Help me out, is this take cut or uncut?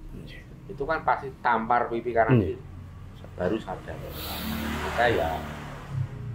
uncut